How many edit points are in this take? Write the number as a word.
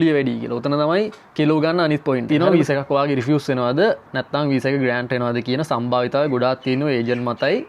one